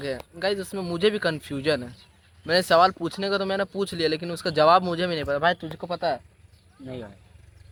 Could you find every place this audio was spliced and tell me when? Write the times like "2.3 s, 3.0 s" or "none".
none